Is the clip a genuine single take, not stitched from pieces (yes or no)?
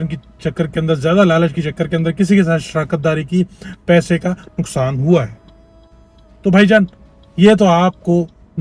yes